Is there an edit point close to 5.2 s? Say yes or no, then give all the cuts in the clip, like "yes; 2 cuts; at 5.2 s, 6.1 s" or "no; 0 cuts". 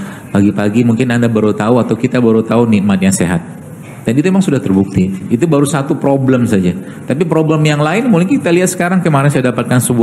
yes; 1 cut; at 5.2 s